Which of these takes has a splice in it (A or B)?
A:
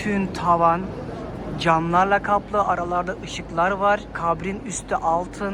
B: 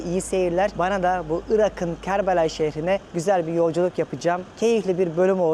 A